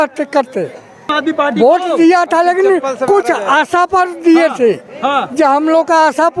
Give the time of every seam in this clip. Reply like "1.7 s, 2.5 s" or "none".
1.1 s